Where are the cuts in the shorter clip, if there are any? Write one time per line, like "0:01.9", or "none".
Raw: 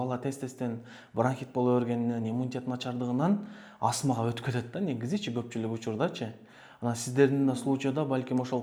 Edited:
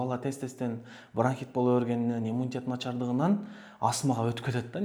none